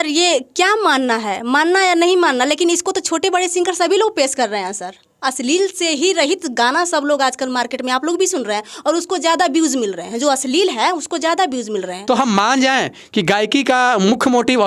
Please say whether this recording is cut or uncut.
uncut